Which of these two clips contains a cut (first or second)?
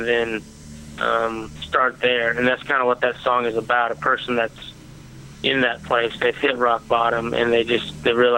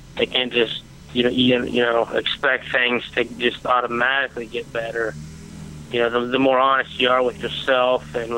second